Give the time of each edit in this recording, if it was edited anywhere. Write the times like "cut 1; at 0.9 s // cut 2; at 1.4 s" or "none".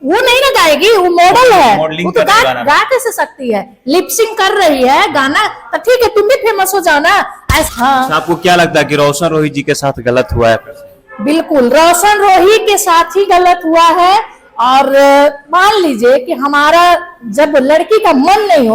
cut 1; at 7.7 s